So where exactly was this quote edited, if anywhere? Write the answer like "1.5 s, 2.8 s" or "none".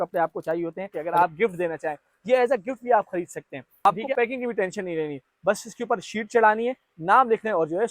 0.9 s, 3.9 s

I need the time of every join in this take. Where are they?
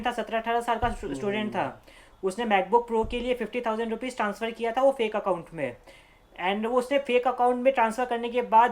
none

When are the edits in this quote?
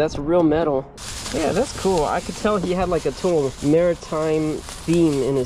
1.0 s, 3.6 s

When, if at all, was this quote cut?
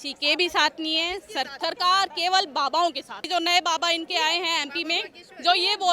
1.5 s, 3.2 s

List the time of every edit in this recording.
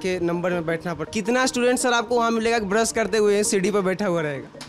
1.0 s

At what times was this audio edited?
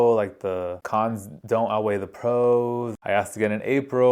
1.1 s, 2.9 s

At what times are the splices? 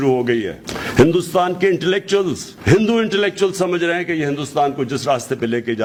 none

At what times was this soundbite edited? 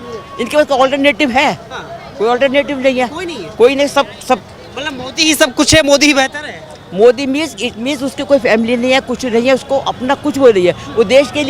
none

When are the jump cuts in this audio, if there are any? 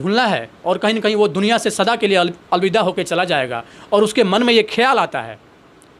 none

